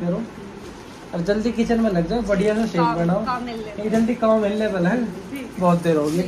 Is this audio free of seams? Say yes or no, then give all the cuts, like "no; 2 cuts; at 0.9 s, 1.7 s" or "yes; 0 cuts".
yes; 0 cuts